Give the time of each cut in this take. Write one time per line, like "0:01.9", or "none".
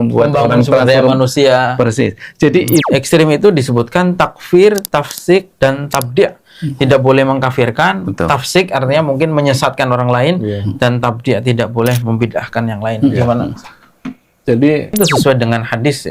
0:02.9
0:14.9